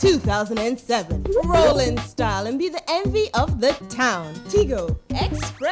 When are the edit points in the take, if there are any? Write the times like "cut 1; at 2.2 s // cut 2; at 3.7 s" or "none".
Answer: cut 1; at 1.2 s